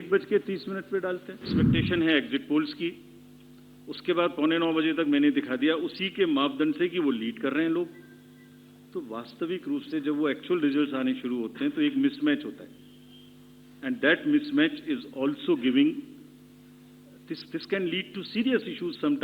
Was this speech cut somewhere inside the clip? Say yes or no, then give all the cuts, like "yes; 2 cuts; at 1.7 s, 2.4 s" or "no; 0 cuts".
yes; 1 cut; at 1.6 s